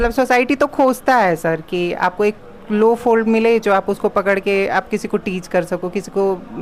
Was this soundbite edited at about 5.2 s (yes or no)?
no